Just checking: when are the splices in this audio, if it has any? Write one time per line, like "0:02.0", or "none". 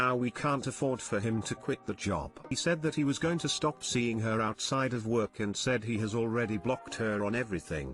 0:02.5